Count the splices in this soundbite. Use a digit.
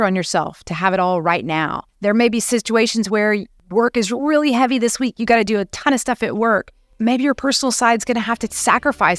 3